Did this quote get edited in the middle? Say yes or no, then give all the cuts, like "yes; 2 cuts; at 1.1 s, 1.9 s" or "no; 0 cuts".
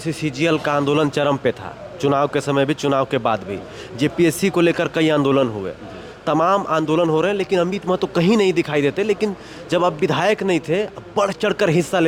no; 0 cuts